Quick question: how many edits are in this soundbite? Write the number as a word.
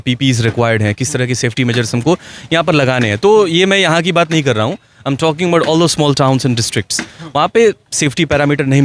zero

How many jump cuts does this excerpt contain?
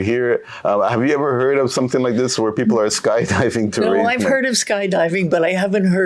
zero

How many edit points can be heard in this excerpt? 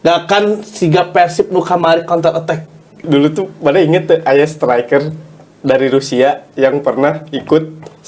one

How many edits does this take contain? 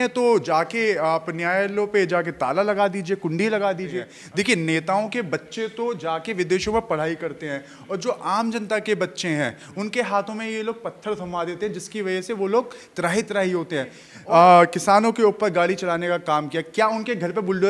two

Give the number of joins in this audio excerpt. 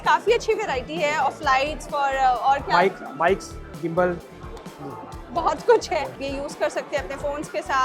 one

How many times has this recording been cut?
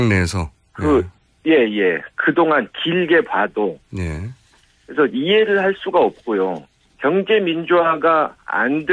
one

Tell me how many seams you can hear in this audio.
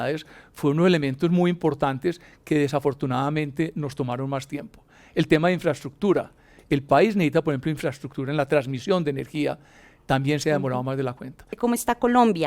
one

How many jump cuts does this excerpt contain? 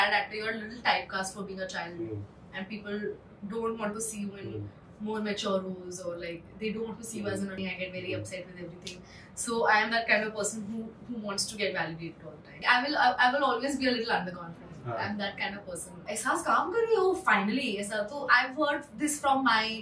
three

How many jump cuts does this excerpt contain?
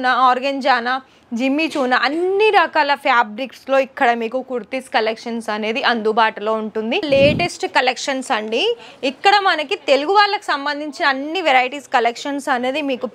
one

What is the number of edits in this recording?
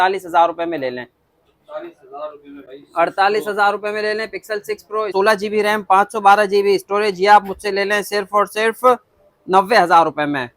one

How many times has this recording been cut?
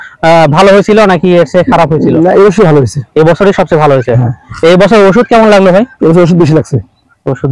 zero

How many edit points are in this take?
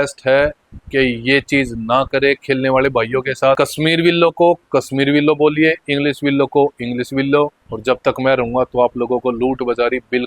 two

